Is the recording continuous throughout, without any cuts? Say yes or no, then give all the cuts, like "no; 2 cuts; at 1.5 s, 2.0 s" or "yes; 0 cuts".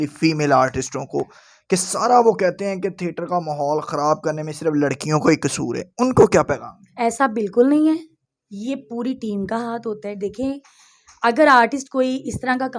yes; 0 cuts